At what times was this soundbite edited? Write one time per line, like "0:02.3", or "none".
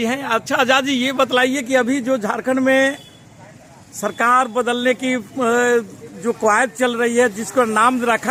none